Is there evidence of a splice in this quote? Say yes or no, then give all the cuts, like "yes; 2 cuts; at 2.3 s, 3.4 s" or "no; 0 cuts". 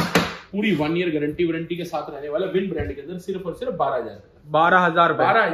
no; 0 cuts